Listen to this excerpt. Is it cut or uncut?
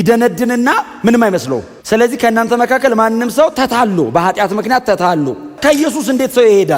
cut